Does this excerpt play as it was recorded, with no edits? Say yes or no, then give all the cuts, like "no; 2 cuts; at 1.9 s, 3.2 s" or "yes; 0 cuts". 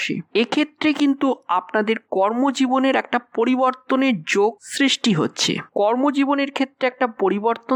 yes; 0 cuts